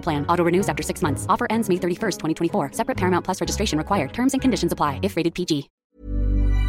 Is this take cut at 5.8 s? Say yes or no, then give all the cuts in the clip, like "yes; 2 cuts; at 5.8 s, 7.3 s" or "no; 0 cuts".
yes; 1 cut; at 5.8 s